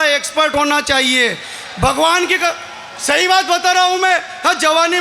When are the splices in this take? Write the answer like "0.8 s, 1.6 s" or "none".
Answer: none